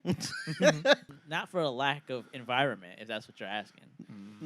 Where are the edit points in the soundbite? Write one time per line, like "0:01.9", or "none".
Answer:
0:01.1